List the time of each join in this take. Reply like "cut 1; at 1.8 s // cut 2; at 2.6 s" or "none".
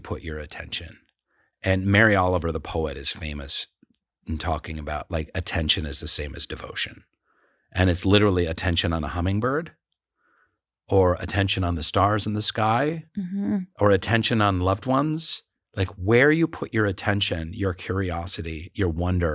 none